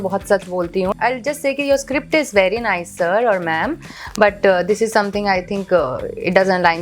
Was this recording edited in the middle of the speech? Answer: yes; 1 cut; at 0.9 s

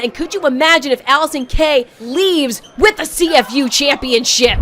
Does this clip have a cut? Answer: yes; 1 cut; at 2.0 s

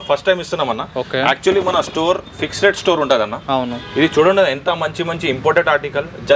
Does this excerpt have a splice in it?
no; 0 cuts

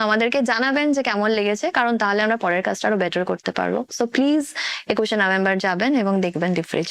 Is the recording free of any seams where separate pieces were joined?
yes; 0 cuts

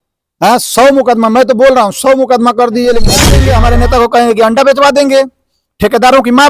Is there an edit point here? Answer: yes; 1 cut; at 3.3 s

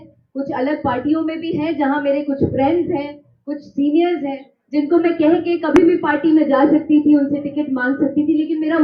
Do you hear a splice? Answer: no; 0 cuts

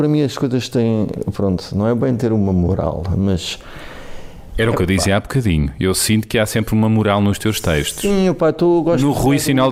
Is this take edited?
no; 0 cuts

